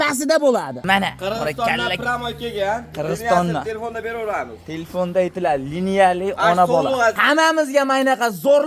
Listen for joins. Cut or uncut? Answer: cut